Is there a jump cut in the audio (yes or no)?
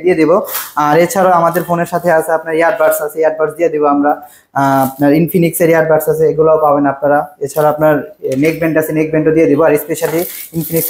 no